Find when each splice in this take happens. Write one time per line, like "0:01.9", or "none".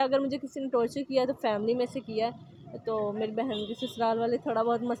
none